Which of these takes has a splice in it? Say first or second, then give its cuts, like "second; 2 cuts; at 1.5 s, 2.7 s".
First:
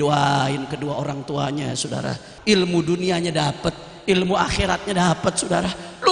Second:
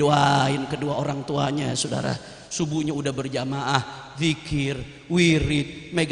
first; 1 cut; at 2.3 s